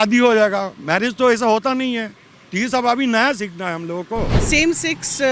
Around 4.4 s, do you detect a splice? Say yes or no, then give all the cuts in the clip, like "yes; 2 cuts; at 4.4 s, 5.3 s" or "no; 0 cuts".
yes; 1 cut; at 4.4 s